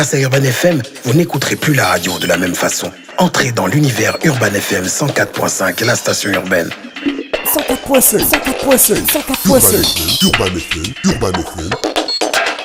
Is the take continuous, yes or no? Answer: yes